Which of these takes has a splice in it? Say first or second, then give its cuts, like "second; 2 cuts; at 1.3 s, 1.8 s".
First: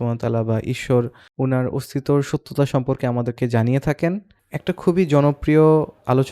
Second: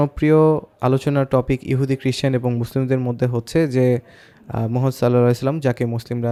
first; 1 cut; at 4.3 s